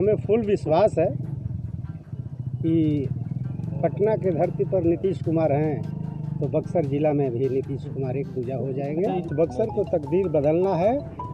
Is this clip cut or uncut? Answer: cut